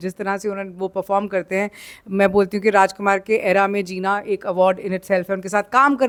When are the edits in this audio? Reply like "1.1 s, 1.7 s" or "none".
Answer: none